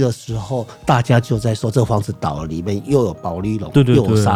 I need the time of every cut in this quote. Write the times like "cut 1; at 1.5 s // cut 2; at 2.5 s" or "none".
none